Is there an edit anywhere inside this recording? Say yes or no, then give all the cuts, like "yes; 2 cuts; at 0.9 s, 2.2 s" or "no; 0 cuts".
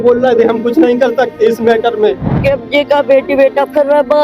yes; 1 cut; at 2.3 s